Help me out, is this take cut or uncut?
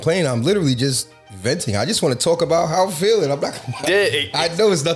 uncut